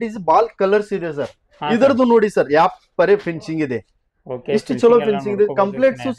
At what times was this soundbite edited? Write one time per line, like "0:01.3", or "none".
none